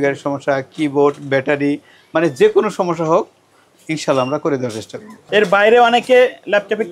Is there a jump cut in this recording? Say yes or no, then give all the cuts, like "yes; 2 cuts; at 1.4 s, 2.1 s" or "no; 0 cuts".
no; 0 cuts